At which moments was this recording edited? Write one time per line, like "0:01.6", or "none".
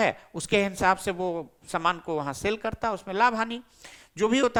none